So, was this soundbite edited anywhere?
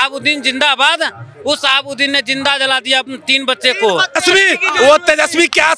yes; 1 cut; at 4.2 s

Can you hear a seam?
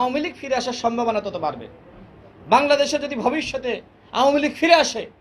no; 0 cuts

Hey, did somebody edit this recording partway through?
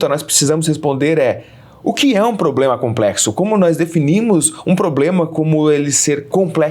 no; 0 cuts

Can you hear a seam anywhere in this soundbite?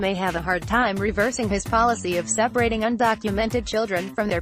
no; 0 cuts

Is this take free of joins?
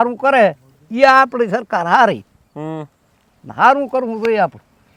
yes; 0 cuts

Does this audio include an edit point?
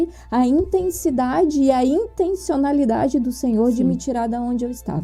no; 0 cuts

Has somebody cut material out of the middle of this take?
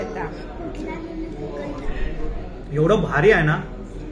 no; 0 cuts

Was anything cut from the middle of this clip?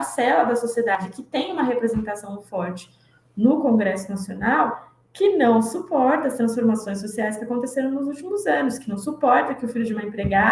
no; 0 cuts

